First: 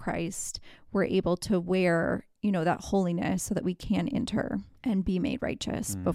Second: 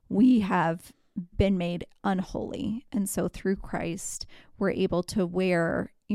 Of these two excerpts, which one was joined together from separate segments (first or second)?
first